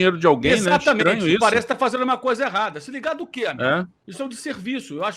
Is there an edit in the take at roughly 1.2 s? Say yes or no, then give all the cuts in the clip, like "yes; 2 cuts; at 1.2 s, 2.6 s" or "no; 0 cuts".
no; 1 cut; at 4.0 s